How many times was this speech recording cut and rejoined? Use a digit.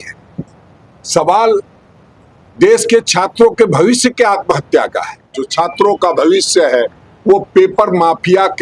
1